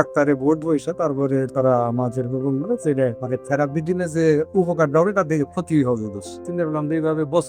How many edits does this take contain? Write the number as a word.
two